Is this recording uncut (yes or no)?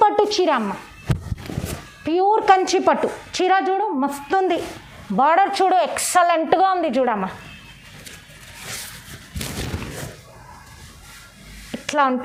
yes